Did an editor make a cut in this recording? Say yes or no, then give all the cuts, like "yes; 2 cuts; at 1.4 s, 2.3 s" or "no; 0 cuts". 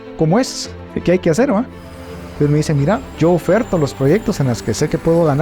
yes; 1 cut; at 3.0 s